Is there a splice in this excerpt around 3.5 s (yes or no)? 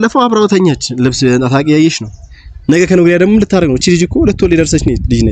no